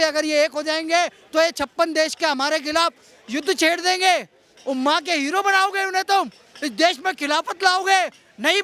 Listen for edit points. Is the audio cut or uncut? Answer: uncut